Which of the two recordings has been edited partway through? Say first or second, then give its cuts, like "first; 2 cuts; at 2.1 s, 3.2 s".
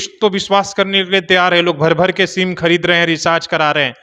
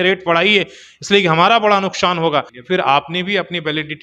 second; 1 cut; at 2.6 s